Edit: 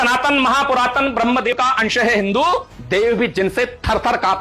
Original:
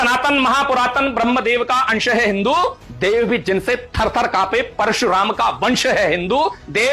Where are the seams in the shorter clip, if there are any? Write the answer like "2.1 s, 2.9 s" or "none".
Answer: 1.5 s